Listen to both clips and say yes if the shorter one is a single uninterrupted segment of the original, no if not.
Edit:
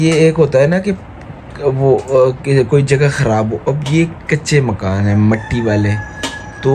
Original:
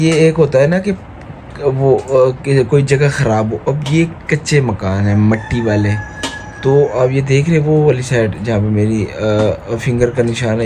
yes